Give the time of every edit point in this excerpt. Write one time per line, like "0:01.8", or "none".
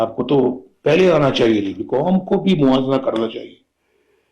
0:01.8